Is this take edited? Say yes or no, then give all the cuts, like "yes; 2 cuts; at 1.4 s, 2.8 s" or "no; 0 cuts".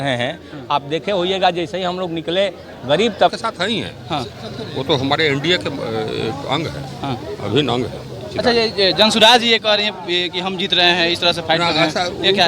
yes; 1 cut; at 3.3 s